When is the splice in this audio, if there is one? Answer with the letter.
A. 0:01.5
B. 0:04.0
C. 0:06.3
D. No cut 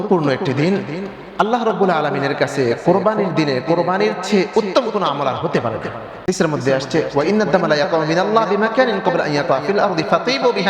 C